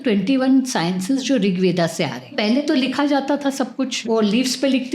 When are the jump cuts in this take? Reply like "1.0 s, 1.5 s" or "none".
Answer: 2.3 s, 4.0 s